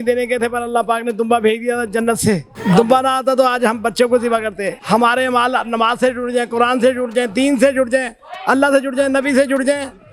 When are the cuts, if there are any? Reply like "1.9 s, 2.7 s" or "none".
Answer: 2.5 s, 4.7 s